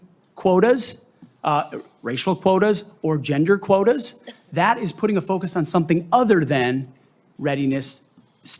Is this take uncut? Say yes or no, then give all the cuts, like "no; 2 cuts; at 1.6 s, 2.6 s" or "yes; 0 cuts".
yes; 0 cuts